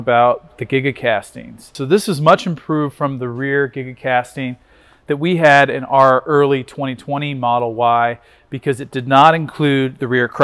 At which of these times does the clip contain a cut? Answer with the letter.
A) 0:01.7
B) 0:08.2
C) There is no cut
A